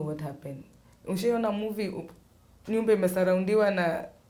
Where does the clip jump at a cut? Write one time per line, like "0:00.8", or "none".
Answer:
none